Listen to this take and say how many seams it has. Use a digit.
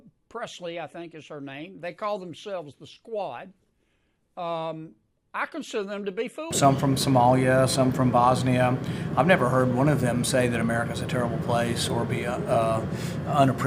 1